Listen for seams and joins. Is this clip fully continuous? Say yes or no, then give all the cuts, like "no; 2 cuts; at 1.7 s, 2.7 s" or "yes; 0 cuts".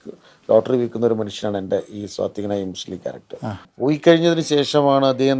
no; 1 cut; at 3.6 s